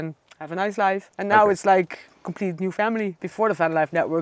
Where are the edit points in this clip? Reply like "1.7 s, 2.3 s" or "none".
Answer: 1.1 s, 3.1 s